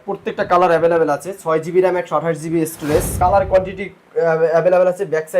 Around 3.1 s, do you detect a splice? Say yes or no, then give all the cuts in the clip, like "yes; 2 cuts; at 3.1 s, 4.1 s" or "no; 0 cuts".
yes; 1 cut; at 3.1 s